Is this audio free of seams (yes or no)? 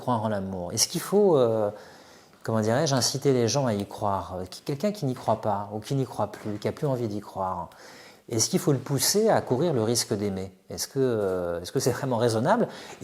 yes